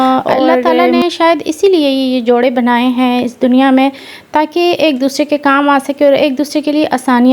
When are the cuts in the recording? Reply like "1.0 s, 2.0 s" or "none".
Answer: none

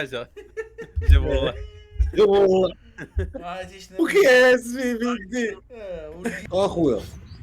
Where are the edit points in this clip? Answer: 6.4 s

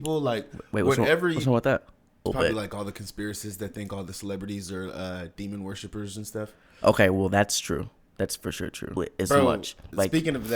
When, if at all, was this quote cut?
2.1 s, 9.0 s

